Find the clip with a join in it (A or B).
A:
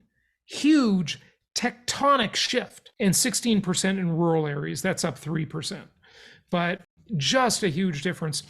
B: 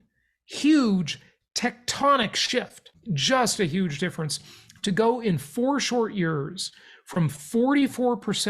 B